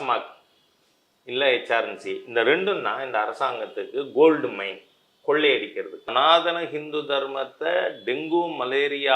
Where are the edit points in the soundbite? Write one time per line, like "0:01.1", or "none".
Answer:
0:06.1